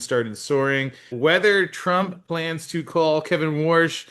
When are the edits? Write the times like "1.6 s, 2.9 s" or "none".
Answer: 1.1 s